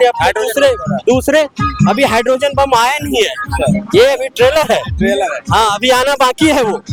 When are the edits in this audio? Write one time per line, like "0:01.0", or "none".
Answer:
none